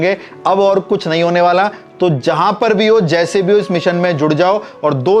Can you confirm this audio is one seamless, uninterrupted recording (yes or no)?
yes